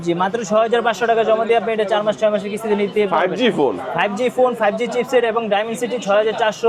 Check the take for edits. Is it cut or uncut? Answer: uncut